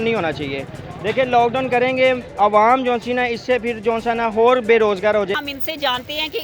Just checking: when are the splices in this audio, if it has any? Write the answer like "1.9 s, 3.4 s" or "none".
5.3 s